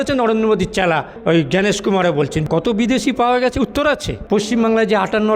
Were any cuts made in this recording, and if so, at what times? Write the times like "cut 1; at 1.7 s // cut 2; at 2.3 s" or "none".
cut 1; at 2.4 s // cut 2; at 4.1 s